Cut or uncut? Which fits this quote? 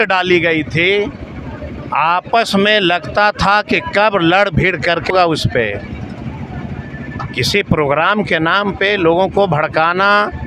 cut